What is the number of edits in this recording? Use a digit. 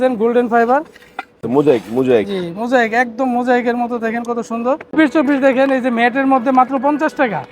2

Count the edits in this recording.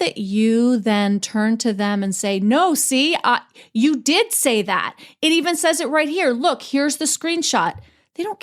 0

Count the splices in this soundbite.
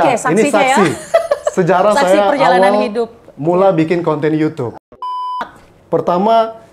1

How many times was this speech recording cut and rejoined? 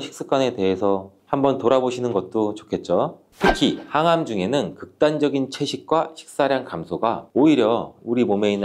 1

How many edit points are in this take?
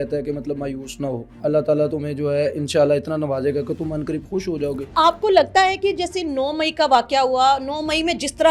2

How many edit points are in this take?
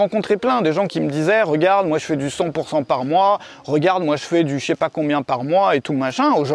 0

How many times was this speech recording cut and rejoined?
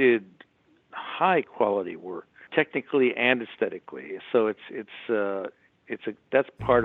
1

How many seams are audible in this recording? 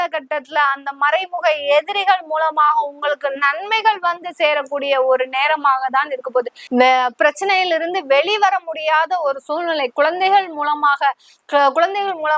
1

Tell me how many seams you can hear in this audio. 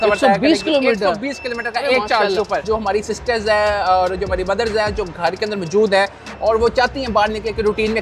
1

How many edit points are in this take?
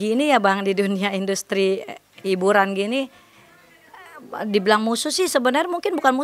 0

